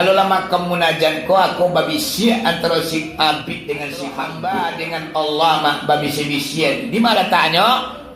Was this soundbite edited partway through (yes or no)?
yes